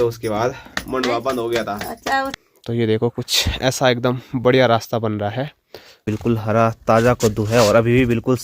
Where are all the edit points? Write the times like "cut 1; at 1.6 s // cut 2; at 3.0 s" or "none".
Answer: cut 1; at 2.3 s // cut 2; at 6.1 s